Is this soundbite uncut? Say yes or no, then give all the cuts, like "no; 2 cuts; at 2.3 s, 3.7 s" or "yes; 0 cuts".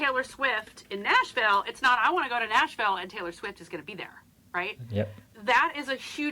no; 1 cut; at 5.2 s